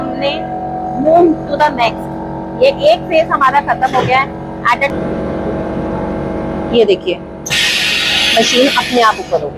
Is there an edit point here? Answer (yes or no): yes